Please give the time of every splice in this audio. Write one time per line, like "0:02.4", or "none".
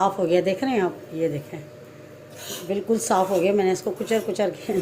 none